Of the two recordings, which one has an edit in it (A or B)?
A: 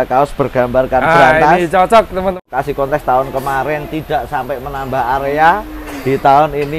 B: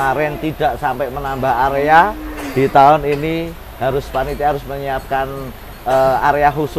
A